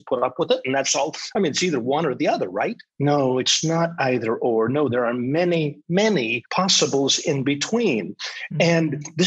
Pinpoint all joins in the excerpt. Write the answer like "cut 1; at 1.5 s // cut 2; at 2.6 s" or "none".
cut 1; at 2.8 s // cut 2; at 5.9 s